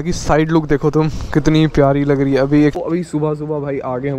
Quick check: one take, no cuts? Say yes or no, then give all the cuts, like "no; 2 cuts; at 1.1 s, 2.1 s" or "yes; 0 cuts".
no; 1 cut; at 2.8 s